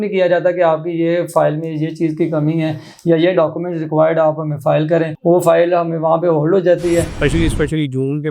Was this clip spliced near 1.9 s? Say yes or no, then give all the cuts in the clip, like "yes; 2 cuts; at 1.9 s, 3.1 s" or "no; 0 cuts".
no; 1 cut; at 7.1 s